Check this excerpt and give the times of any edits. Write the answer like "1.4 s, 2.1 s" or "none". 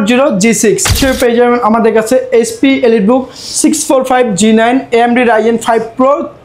1.0 s